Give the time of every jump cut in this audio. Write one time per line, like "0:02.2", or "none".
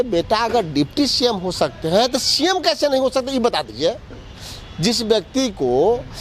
none